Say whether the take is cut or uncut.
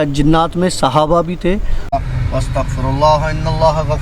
cut